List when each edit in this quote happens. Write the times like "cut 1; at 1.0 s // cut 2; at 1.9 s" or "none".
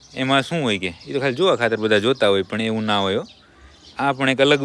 none